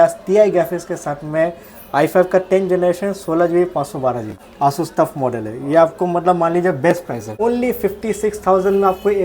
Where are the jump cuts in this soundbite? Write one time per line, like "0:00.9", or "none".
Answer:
0:04.4
0:07.2